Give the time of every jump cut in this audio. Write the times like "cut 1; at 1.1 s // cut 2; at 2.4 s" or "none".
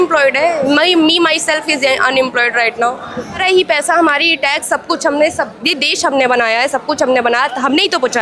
cut 1; at 3.4 s